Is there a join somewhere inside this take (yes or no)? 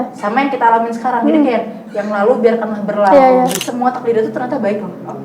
yes